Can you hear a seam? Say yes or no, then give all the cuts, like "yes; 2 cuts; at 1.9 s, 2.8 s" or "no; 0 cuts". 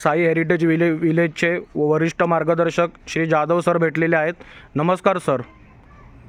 no; 0 cuts